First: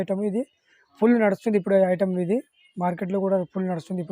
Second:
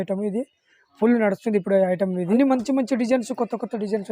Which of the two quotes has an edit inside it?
second; 1 cut; at 2.3 s

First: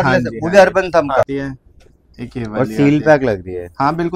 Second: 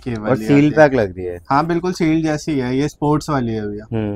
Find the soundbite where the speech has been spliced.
first; 1 cut; at 1.3 s

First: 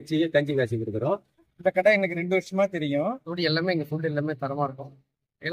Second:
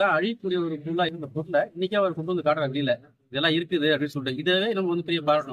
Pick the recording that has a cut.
first; 2 cuts; at 1.3 s, 3.3 s

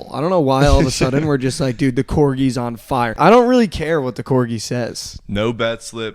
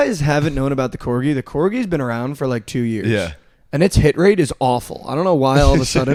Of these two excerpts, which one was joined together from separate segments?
first; 1 cut; at 3.1 s

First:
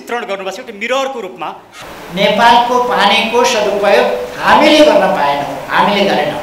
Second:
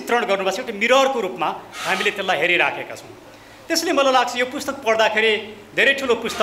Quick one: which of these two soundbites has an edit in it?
first; 1 cut; at 1.7 s

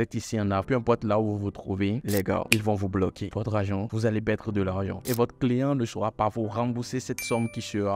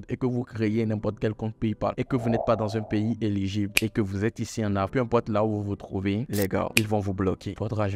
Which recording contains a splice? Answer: first; 1 cut; at 5.2 s

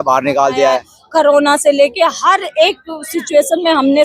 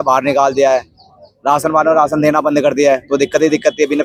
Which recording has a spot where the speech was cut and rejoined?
first; 1 cut; at 0.9 s

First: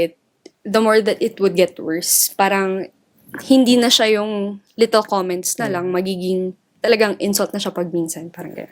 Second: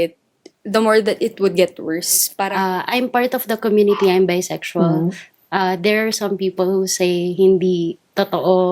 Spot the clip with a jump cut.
second; 1 cut; at 2.5 s

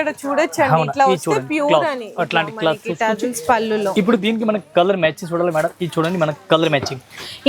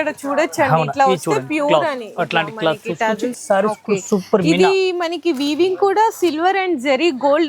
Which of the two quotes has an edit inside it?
second; 1 cut; at 3.4 s

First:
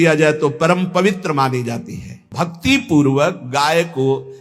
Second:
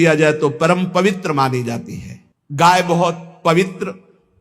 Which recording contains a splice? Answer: first; 1 cut; at 2.3 s

